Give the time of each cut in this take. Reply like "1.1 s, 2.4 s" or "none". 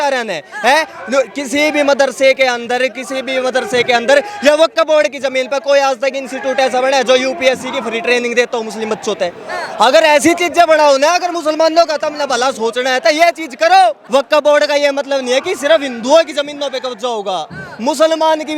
14.0 s